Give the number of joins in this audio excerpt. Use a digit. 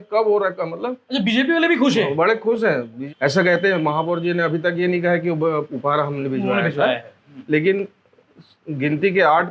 1